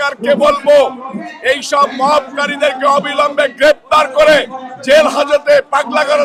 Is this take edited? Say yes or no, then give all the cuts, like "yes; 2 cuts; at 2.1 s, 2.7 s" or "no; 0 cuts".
no; 0 cuts